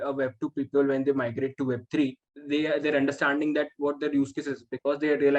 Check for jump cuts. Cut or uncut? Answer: cut